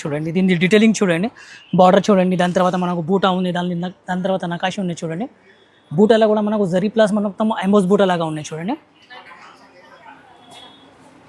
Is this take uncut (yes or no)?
yes